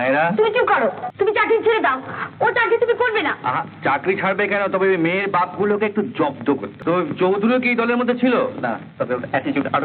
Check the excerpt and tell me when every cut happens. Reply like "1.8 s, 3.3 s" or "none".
1.0 s, 6.7 s